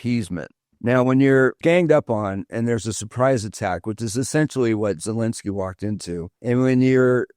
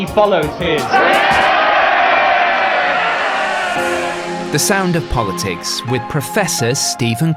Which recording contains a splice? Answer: first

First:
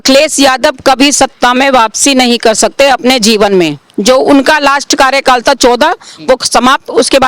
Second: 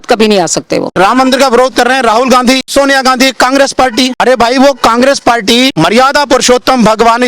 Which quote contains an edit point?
second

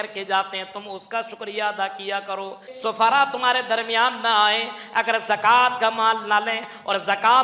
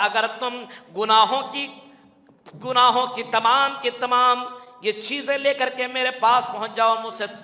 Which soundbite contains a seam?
first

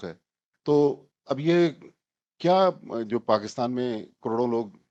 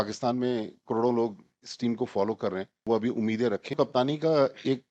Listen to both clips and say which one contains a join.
second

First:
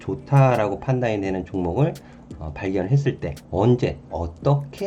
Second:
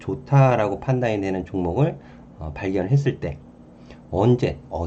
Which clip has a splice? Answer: first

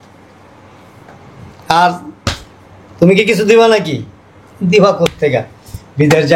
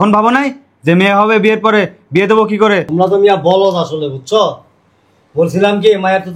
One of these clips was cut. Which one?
second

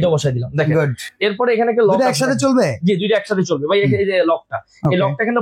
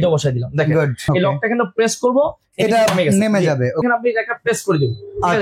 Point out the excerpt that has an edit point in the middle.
second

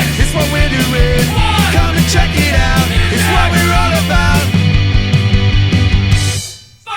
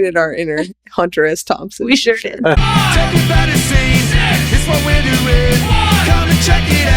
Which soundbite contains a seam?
second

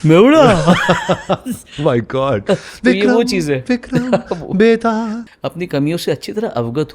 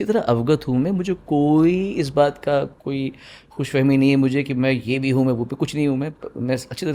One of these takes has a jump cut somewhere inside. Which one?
first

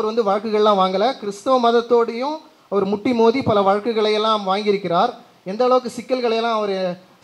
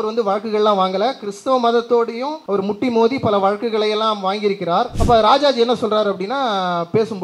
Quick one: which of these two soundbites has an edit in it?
second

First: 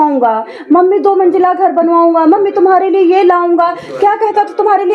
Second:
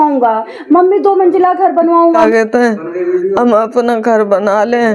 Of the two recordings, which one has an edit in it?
second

